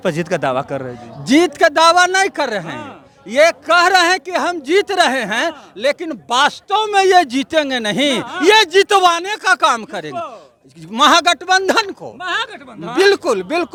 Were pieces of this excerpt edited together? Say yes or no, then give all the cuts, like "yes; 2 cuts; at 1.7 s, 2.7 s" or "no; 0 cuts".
no; 0 cuts